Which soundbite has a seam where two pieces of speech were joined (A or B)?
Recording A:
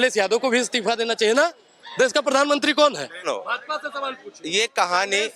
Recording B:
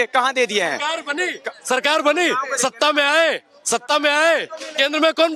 A